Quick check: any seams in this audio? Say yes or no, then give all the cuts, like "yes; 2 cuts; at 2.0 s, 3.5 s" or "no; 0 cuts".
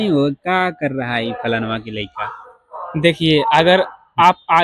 no; 0 cuts